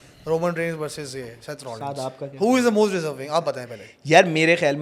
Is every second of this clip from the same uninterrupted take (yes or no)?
yes